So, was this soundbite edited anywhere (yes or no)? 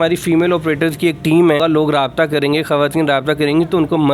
yes